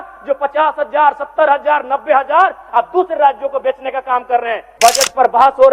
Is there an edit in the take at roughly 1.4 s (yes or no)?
no